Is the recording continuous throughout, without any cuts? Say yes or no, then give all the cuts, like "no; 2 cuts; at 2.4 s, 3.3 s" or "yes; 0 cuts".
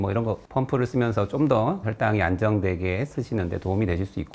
no; 1 cut; at 1.9 s